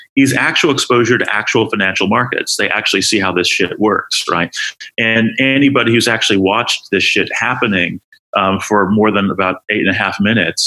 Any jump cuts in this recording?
no; 0 cuts

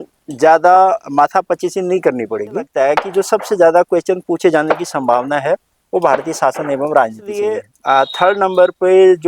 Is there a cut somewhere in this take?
yes; 2 cuts; at 2.7 s, 7.7 s

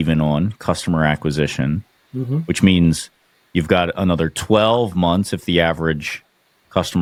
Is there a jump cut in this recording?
no; 0 cuts

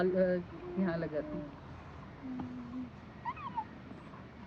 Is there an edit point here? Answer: no; 0 cuts

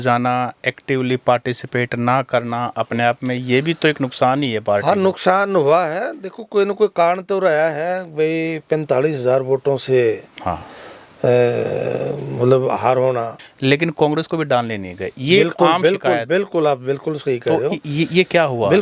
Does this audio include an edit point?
yes; 1 cut; at 13.4 s

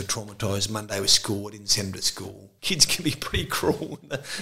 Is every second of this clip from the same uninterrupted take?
no; 1 cut; at 2.5 s

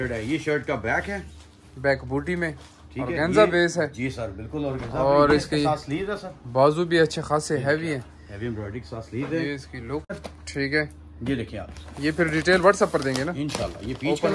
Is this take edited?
yes; 1 cut; at 10.1 s

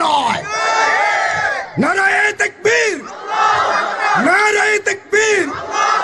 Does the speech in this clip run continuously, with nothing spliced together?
no; 1 cut; at 1.4 s

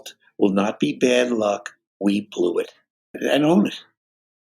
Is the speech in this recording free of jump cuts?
no; 1 cut; at 3.1 s

